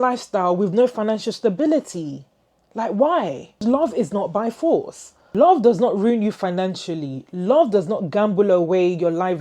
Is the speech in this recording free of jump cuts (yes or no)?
no